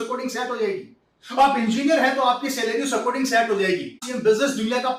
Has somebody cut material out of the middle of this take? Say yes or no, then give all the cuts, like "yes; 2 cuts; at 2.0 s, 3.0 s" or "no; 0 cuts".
yes; 1 cut; at 4.1 s